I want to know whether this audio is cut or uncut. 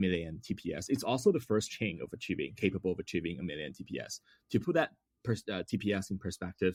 uncut